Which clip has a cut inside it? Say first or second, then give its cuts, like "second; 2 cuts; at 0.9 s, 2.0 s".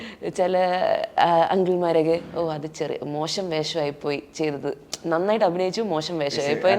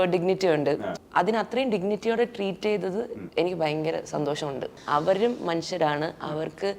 second; 3 cuts; at 0.9 s, 3.2 s, 4.8 s